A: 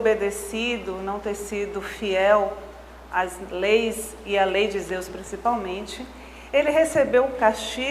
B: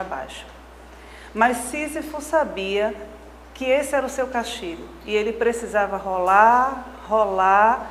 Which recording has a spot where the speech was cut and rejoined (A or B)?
A